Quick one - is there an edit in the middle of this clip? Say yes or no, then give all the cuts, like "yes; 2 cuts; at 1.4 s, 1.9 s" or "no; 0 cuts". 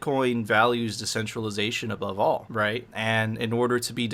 yes; 1 cut; at 2.8 s